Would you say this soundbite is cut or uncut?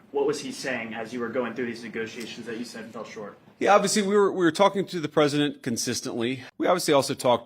cut